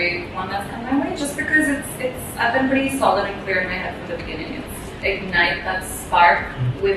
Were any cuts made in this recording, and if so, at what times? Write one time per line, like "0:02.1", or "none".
0:04.9